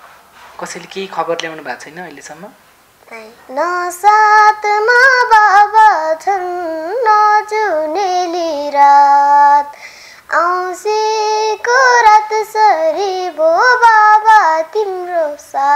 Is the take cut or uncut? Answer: cut